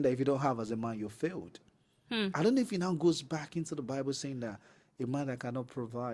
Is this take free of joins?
yes; 0 cuts

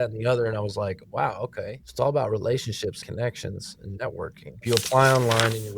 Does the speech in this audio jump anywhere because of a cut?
yes; 1 cut; at 4.6 s

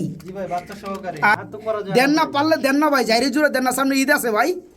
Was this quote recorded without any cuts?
no; 1 cut; at 1.3 s

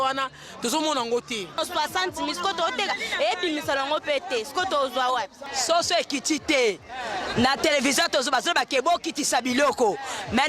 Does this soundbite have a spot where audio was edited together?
yes; 2 cuts; at 1.6 s, 5.4 s

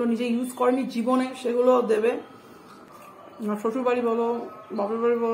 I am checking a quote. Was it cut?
yes; 1 cut; at 2.8 s

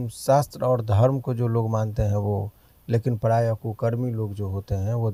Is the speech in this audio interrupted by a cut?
no; 0 cuts

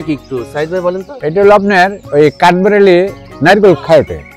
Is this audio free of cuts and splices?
yes; 0 cuts

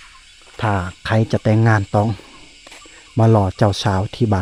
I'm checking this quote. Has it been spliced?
no; 0 cuts

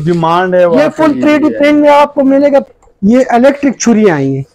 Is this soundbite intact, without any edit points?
no; 1 cut; at 2.7 s

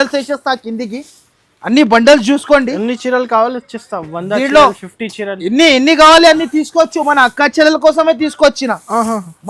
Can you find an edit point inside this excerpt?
no; 0 cuts

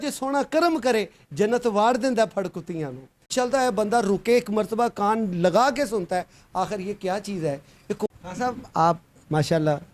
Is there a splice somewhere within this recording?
yes; 2 cuts; at 3.2 s, 8.1 s

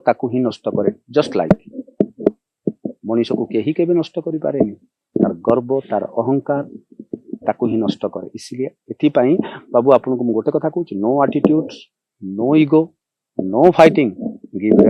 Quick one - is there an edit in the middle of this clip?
no; 0 cuts

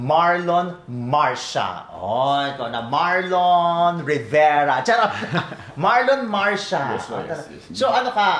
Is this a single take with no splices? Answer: yes; 0 cuts

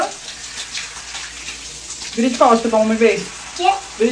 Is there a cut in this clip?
no; 0 cuts

